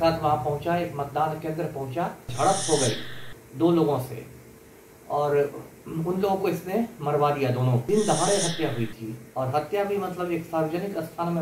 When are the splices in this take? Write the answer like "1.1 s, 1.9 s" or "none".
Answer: 2.3 s, 7.9 s